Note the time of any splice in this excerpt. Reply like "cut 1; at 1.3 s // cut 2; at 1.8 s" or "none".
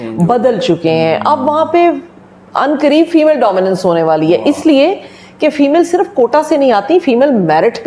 none